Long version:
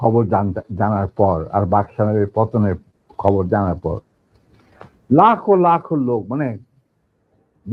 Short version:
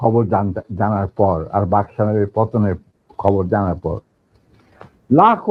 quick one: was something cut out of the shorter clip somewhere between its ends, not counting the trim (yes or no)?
no